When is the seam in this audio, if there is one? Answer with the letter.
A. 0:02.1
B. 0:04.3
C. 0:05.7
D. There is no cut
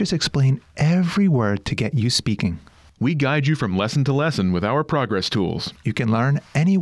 D